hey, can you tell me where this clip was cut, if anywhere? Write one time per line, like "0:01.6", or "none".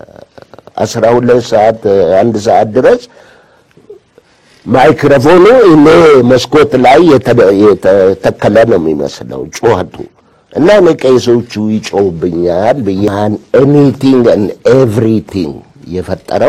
0:13.1

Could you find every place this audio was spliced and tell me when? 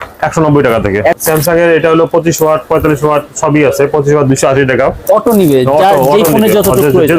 0:01.2
0:05.0

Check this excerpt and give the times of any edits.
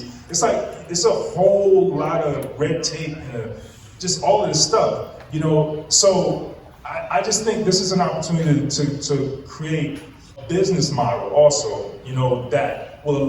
0:10.4

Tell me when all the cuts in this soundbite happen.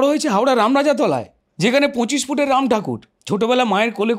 0:01.4
0:03.1

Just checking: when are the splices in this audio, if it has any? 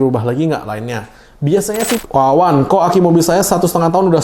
0:02.0

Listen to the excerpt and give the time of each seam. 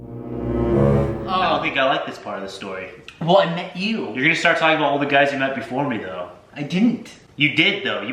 0:01.2

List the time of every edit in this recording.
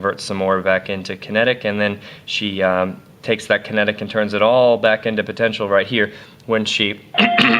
0:06.7

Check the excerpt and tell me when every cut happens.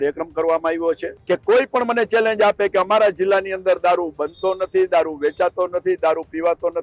0:01.1

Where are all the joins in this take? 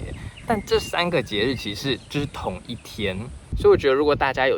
0:03.5

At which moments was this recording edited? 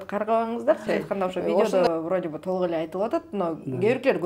0:01.6

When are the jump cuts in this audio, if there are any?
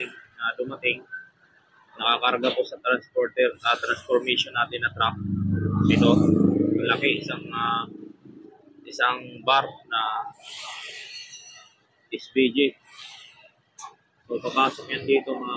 none

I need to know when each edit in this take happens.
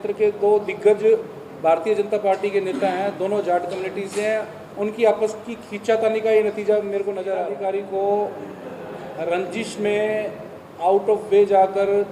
0:07.5

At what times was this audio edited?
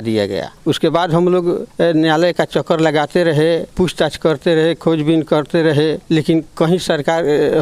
none

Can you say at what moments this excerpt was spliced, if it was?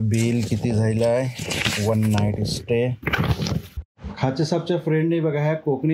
0:03.8

